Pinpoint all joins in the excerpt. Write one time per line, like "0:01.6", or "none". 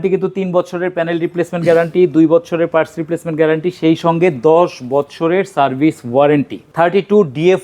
0:06.7